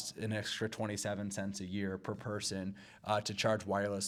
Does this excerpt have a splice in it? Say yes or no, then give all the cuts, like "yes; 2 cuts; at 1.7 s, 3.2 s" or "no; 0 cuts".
no; 0 cuts